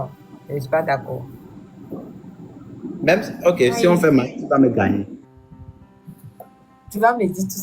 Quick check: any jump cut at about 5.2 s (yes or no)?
yes